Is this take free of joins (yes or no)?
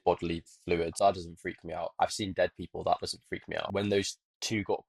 no